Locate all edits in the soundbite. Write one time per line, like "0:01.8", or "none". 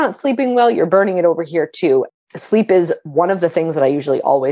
0:02.1